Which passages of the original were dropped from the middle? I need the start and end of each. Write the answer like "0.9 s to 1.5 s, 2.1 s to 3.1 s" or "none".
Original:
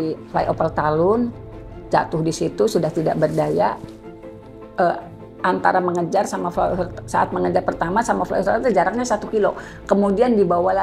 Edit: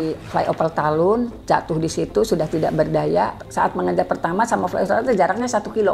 1.4 s to 1.8 s, 3.9 s to 7.0 s